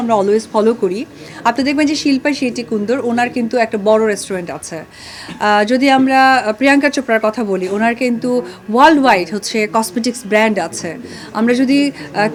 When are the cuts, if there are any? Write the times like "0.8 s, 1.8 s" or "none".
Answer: none